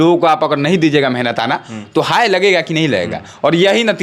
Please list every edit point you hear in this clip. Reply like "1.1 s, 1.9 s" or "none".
none